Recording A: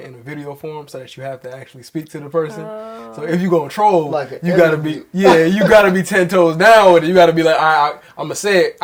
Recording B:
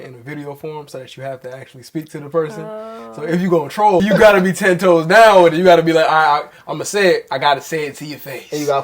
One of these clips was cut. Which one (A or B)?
B